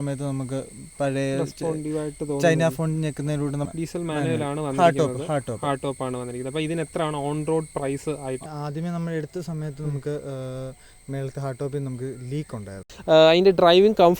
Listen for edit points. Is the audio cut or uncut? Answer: cut